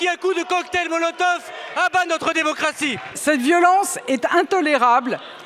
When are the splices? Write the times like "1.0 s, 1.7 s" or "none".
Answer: 3.1 s